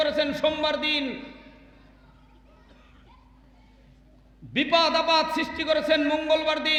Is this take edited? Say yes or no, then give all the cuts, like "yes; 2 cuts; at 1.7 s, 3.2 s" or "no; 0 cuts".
no; 0 cuts